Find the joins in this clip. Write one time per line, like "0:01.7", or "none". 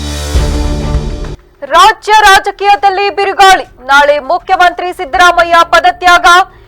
0:01.3